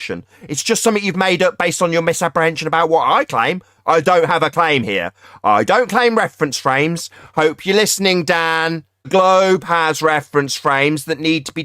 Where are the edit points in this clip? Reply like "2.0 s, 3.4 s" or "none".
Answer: 9.1 s